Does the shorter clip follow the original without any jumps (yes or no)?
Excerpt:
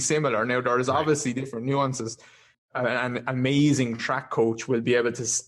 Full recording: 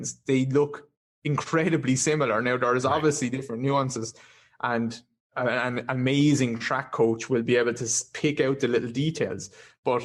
no